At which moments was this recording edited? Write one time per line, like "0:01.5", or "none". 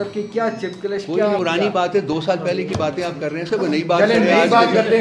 0:01.4